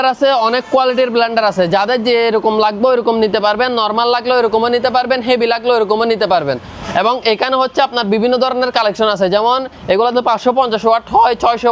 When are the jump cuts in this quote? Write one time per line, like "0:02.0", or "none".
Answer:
none